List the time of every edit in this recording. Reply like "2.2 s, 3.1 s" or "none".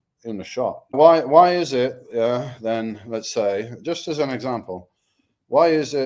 0.9 s